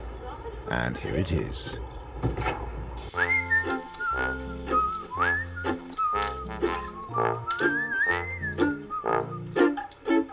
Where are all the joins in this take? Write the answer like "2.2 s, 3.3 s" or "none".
none